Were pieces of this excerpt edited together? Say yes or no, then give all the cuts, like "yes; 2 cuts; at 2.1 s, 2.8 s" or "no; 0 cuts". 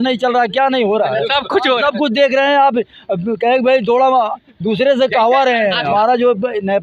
yes; 1 cut; at 5.9 s